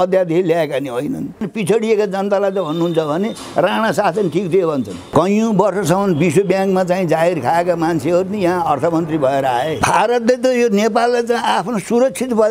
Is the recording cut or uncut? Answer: cut